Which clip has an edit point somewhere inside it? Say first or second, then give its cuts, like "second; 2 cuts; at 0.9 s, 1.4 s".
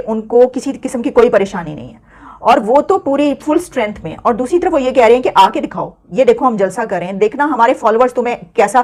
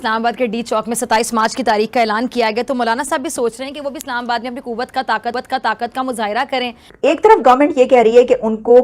second; 1 cut; at 6.8 s